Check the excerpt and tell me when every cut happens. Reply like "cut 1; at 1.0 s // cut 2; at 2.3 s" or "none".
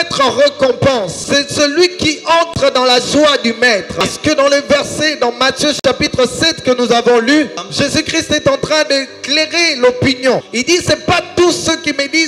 cut 1; at 1.2 s // cut 2; at 4.0 s // cut 3; at 7.6 s // cut 4; at 10.5 s